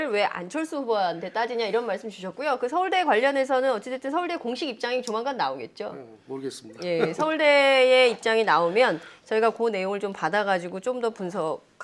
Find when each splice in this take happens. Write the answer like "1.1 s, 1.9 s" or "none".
4.4 s